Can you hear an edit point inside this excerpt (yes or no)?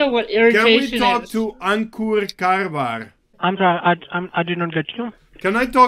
no